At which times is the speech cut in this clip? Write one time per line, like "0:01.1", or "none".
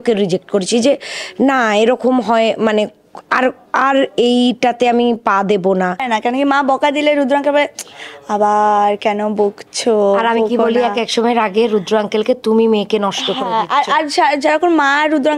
0:06.1